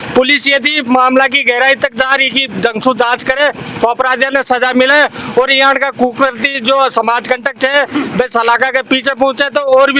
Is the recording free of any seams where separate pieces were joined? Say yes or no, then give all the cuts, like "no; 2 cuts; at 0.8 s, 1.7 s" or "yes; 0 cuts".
yes; 0 cuts